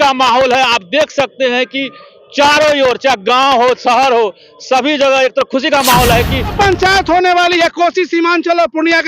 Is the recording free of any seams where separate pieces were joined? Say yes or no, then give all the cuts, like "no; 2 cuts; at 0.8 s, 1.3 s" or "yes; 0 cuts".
no; 1 cut; at 6.5 s